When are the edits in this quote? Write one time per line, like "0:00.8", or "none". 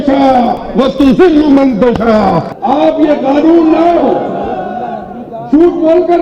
0:02.5